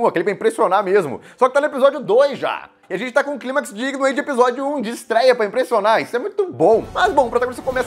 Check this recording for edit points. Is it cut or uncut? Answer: uncut